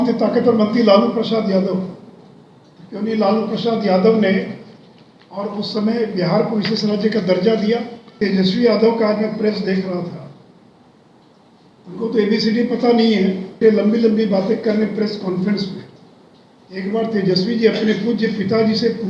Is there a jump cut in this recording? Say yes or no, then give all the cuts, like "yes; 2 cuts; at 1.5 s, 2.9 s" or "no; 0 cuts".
yes; 2 cuts; at 8.2 s, 13.6 s